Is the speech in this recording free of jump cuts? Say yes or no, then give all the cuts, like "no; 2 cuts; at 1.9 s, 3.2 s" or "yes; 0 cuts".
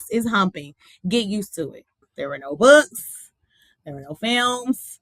no; 1 cut; at 2.0 s